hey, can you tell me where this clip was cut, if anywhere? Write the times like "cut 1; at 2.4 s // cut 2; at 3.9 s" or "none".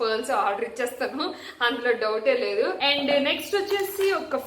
cut 1; at 2.8 s